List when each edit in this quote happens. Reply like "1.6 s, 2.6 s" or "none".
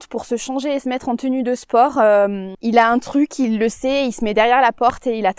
2.5 s